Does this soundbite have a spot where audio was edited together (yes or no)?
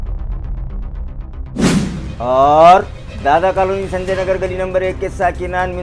no